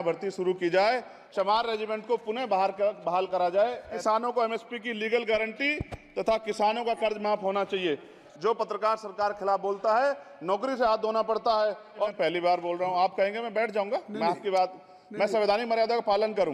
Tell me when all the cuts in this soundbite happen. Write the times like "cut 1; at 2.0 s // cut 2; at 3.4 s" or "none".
cut 1; at 1.2 s // cut 2; at 3.9 s // cut 3; at 8.2 s // cut 4; at 12.1 s